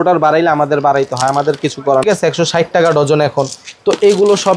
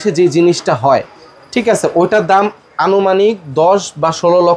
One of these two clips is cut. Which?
first; 1 cut; at 2.0 s

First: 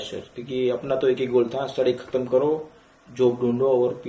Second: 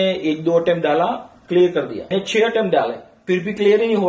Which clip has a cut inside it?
second; 2 cuts; at 2.1 s, 3.1 s

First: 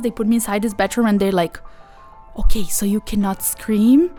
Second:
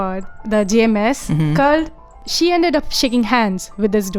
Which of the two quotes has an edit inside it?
second; 1 cut; at 2.2 s

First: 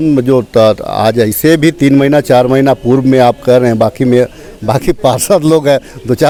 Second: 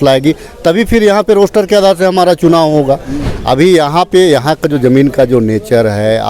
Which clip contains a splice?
second; 1 cut; at 3.2 s

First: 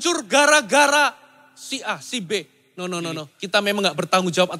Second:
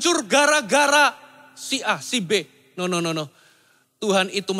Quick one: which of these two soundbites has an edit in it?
first; 1 cut; at 3.3 s

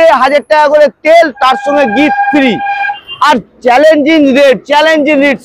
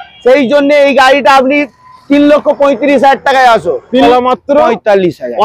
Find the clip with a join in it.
second; 1 cut; at 4.0 s

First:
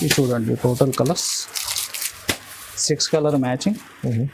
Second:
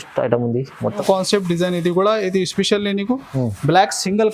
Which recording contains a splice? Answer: second; 1 cut; at 1.0 s

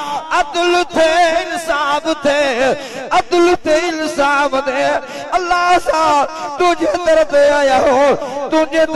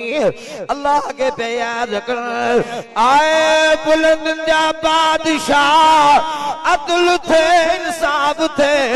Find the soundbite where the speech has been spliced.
second; 1 cut; at 2.8 s

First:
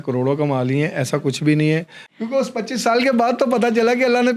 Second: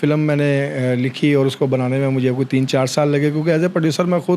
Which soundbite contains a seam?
first; 1 cut; at 2.0 s

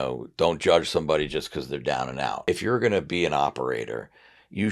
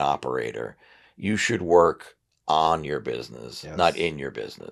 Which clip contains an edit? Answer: first; 1 cut; at 2.4 s

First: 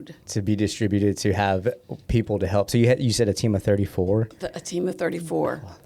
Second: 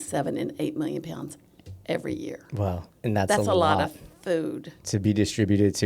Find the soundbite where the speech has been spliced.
second; 1 cut; at 2.9 s

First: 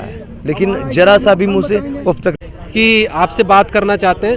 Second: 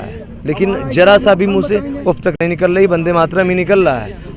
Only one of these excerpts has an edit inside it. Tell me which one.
first; 1 cut; at 2.4 s

